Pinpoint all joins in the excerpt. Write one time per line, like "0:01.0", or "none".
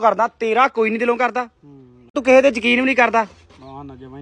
0:02.2